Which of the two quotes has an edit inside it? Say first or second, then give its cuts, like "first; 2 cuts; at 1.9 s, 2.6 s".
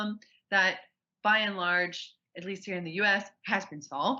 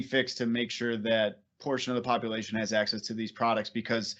second; 1 cut; at 1.5 s